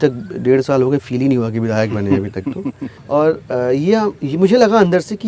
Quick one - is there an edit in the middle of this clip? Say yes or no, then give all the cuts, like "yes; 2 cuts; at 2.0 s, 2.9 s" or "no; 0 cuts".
yes; 1 cut; at 2.9 s